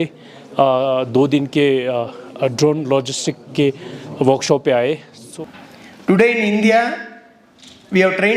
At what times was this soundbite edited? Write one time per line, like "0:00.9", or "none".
0:05.2